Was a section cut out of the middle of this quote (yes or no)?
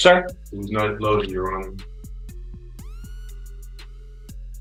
no